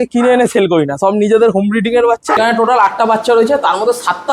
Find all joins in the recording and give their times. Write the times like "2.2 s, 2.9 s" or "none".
2.4 s